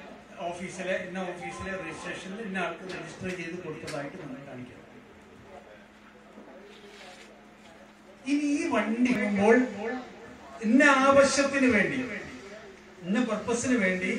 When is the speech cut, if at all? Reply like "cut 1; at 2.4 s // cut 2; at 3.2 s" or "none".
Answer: cut 1; at 9.2 s